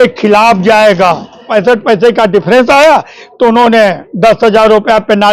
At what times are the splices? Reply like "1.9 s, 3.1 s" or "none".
1.5 s